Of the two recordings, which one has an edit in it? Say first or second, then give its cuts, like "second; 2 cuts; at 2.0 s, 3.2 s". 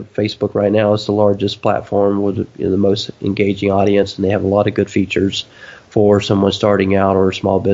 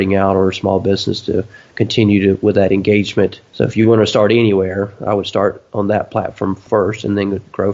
second; 3 cuts; at 3.4 s, 5.6 s, 6.6 s